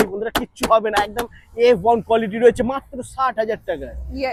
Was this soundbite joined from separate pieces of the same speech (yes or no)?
no